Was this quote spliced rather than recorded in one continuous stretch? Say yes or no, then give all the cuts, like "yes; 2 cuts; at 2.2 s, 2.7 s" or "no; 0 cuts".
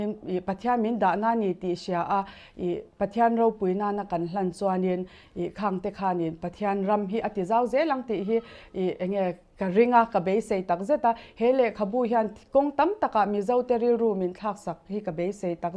no; 0 cuts